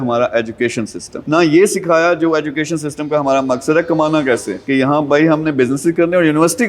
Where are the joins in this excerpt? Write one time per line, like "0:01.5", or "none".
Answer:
0:01.2
0:04.6